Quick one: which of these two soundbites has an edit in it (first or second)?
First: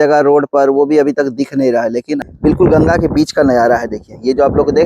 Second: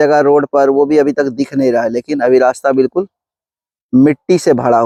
first